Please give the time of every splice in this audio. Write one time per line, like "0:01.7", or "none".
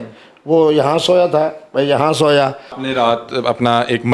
0:02.8

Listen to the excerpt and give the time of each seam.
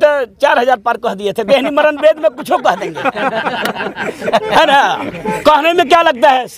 none

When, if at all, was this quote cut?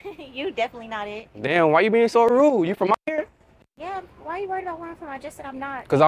none

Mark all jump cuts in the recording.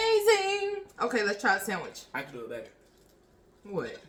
none

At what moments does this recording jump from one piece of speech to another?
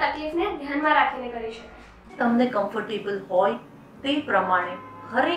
0:02.1

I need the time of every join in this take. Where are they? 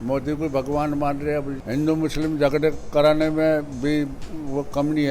0:01.6

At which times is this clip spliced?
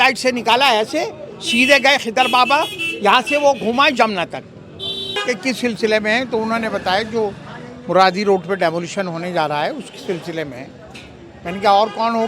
0:05.2

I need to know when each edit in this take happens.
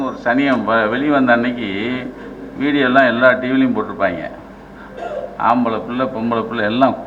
none

